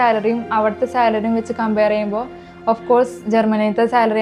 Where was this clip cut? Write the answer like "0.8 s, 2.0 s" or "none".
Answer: none